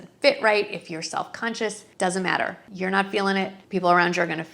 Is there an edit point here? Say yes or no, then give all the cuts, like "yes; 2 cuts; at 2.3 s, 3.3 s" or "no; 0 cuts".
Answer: yes; 2 cuts; at 2.6 s, 3.6 s